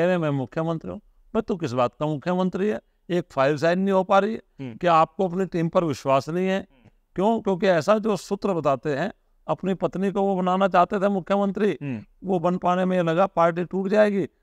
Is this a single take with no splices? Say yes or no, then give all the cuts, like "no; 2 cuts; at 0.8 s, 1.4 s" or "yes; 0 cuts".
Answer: yes; 0 cuts